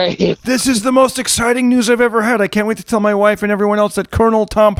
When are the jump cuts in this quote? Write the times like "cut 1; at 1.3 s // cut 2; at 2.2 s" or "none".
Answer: none